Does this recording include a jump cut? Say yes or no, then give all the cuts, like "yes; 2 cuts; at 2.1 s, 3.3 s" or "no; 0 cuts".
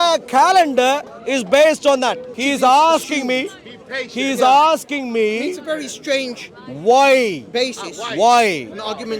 yes; 1 cut; at 2.3 s